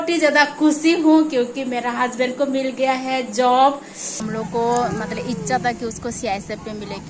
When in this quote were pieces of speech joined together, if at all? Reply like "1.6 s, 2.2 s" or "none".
4.2 s